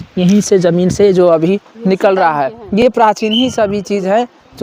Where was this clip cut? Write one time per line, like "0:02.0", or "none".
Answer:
none